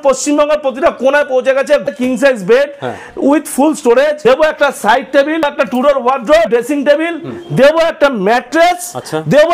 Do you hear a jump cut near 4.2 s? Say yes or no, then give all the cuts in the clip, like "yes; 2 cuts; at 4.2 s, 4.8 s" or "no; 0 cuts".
yes; 4 cuts; at 1.9 s, 4.2 s, 5.4 s, 6.5 s